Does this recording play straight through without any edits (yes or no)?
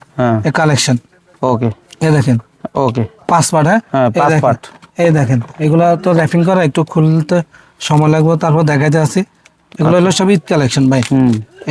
yes